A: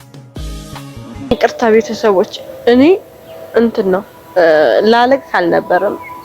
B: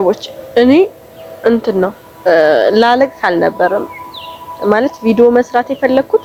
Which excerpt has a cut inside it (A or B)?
A